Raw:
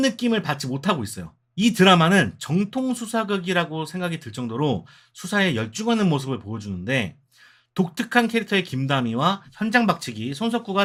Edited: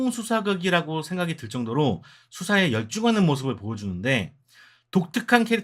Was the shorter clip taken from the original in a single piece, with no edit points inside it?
yes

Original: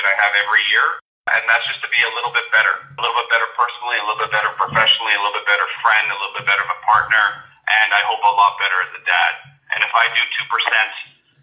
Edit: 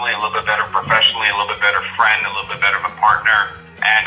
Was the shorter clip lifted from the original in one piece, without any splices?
yes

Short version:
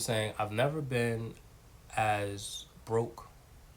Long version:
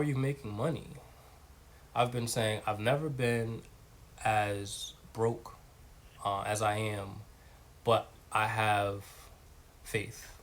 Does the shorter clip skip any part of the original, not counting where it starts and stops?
no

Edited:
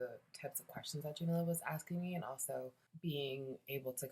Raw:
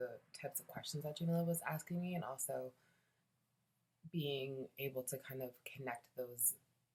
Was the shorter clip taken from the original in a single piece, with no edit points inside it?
no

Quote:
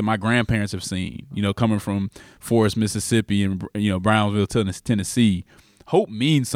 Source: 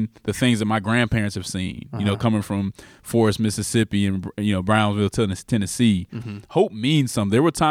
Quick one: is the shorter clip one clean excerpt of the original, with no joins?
yes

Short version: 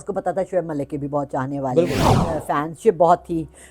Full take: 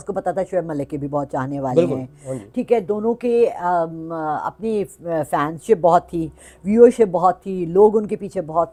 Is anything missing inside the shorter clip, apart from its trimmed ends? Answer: yes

